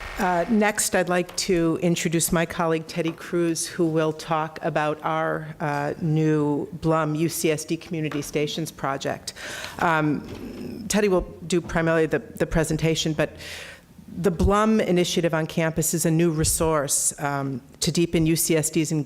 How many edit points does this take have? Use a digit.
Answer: 1